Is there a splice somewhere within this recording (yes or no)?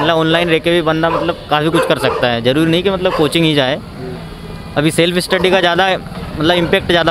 no